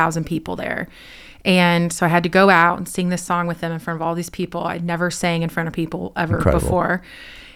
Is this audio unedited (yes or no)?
yes